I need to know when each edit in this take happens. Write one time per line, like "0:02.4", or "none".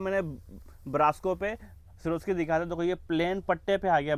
none